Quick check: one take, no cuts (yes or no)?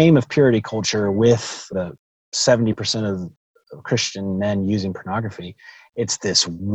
no